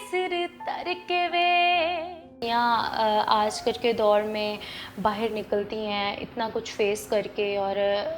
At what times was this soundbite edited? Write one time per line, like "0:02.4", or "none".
0:02.4